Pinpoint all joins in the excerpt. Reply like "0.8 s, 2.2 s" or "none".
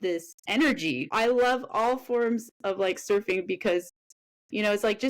1.1 s